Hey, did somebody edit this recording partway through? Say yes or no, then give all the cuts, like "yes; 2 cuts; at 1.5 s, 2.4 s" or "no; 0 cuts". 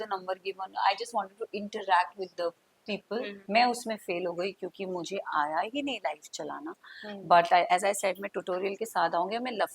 yes; 1 cut; at 3.4 s